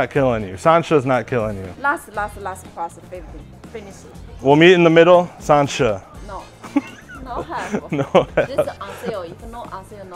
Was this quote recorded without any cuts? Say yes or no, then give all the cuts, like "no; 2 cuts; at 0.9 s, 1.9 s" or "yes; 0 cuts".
yes; 0 cuts